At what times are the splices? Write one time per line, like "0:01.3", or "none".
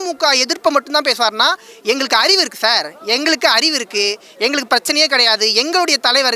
none